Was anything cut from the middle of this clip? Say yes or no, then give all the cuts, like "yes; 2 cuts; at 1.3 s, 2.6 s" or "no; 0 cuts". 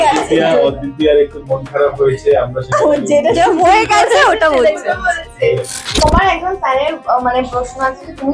yes; 1 cut; at 5.8 s